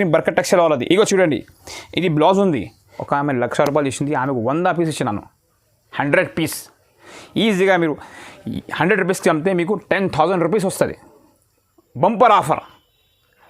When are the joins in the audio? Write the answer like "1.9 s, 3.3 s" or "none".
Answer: 3.0 s

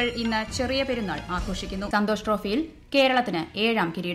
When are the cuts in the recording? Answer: 1.9 s

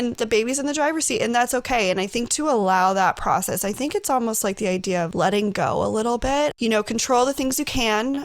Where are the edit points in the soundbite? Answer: 5.1 s, 6.5 s

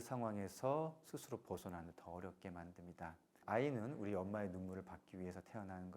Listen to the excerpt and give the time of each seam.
3.3 s

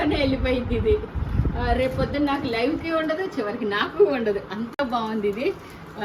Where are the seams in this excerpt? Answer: none

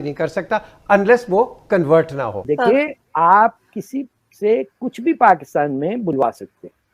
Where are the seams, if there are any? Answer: 2.4 s

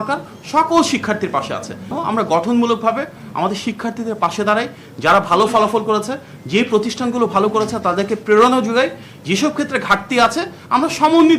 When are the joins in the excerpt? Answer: 2.0 s

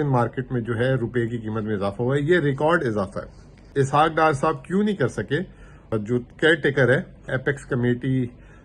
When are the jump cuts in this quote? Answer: 3.6 s, 5.8 s, 7.3 s

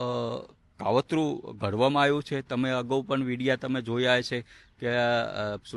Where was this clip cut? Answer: none

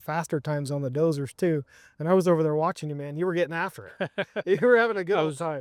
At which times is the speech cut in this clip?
none

